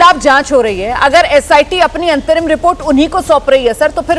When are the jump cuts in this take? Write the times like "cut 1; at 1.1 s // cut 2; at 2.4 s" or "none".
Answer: none